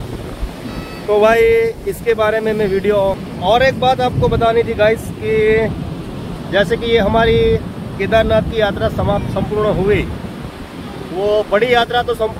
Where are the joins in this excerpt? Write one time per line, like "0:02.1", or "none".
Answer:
0:03.3